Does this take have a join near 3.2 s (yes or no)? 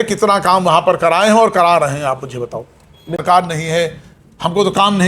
yes